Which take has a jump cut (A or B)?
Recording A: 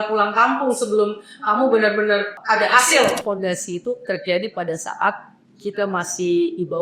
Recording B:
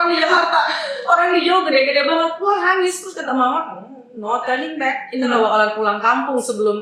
A